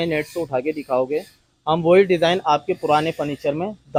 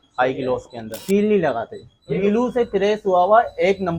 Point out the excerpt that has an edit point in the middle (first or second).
second